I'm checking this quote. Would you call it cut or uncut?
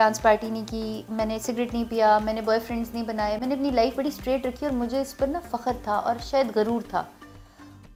uncut